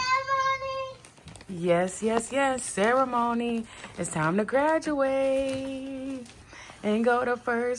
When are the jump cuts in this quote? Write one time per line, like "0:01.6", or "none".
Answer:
none